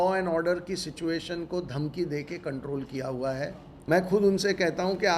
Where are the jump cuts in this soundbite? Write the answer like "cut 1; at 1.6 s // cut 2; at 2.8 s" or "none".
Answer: cut 1; at 3.7 s

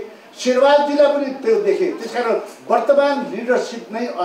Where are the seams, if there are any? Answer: none

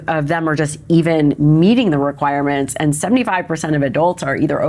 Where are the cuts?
none

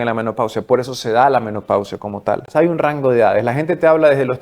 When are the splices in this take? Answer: cut 1; at 2.5 s

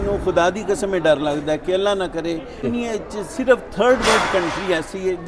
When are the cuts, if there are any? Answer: cut 1; at 2.6 s

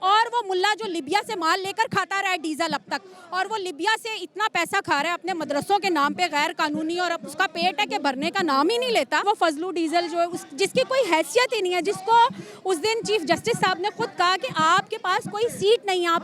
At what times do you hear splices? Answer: cut 1; at 9.2 s

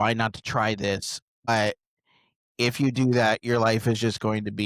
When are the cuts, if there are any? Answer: cut 1; at 1.5 s

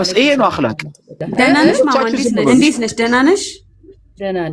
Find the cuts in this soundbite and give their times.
cut 1; at 2.5 s

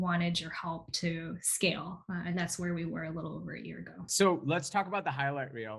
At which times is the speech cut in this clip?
cut 1; at 4.1 s

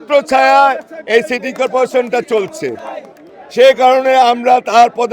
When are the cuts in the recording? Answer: cut 1; at 3.2 s

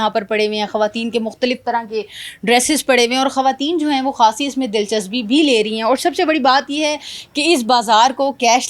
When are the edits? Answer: none

